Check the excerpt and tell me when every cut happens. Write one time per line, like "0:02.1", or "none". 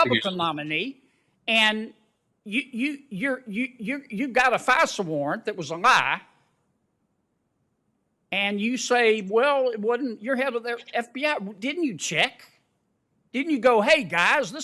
none